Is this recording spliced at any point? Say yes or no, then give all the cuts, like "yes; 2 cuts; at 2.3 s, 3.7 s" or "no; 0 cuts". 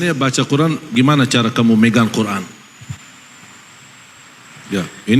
yes; 1 cut; at 0.9 s